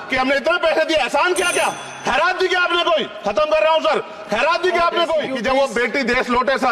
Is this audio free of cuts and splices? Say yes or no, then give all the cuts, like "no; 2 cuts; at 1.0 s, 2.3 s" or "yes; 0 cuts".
no; 1 cut; at 5.3 s